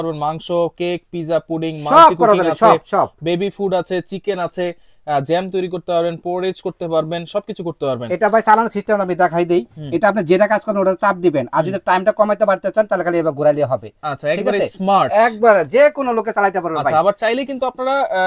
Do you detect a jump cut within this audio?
no; 0 cuts

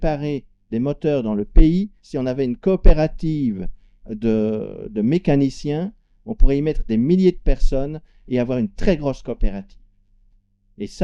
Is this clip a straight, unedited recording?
yes; 0 cuts

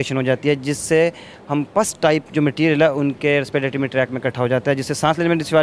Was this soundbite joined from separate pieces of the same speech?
no; 0 cuts

